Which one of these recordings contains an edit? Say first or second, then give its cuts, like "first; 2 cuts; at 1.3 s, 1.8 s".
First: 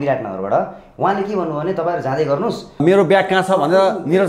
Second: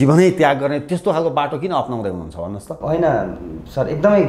first; 1 cut; at 2.8 s